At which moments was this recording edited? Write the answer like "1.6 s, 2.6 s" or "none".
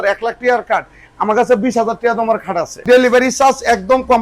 2.8 s